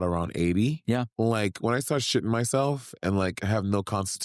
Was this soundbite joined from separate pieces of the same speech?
yes; 1 cut; at 1.1 s

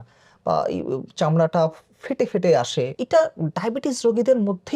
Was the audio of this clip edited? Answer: yes; 1 cut; at 3.0 s

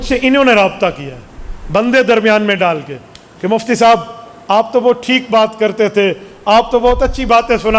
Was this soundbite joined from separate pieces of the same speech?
no; 0 cuts

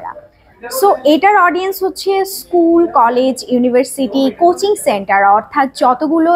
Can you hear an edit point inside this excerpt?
no; 0 cuts

